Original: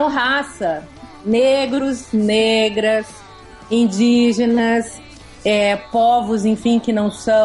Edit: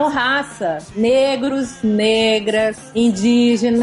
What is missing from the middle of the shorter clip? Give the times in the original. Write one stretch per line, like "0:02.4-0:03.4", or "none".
0:00.9-0:01.2
0:03.1-0:03.6